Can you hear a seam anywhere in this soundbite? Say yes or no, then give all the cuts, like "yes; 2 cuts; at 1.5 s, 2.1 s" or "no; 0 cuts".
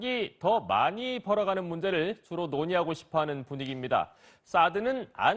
yes; 1 cut; at 1.7 s